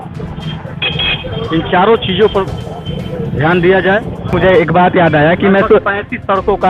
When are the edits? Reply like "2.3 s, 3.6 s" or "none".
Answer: 4.3 s